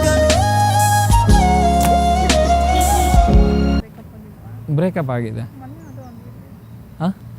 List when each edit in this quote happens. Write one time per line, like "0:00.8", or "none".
0:03.8